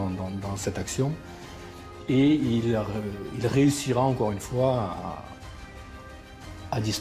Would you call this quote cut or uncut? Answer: uncut